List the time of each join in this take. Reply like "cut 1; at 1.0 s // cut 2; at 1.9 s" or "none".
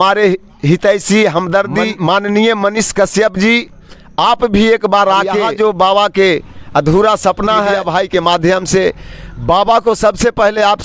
cut 1; at 1.9 s // cut 2; at 5.4 s // cut 3; at 7.8 s